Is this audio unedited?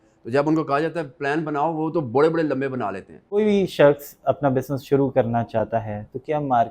no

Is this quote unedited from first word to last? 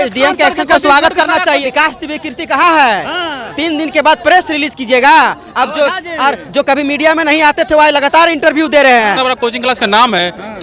no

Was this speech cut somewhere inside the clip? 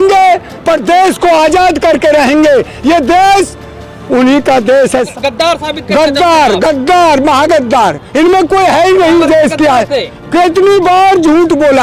yes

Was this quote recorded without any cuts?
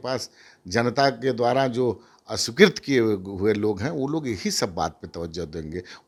yes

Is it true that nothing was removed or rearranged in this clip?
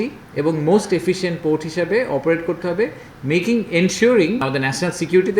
no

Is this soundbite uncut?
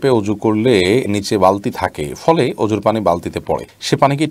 yes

